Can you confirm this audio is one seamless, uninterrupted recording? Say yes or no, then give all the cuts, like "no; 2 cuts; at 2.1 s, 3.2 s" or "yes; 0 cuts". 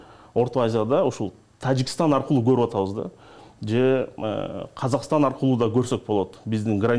yes; 0 cuts